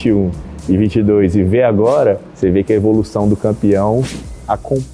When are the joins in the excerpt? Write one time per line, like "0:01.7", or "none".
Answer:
none